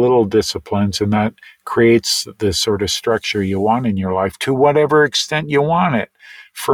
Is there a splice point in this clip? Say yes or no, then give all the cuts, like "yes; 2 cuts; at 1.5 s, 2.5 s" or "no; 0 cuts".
no; 0 cuts